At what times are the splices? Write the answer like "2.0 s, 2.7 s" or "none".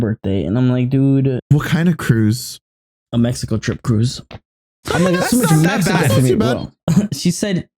1.4 s, 6.7 s